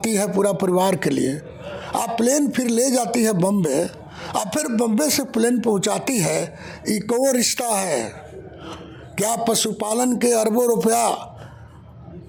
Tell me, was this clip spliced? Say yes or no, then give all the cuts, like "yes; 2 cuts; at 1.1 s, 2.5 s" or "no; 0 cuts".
no; 0 cuts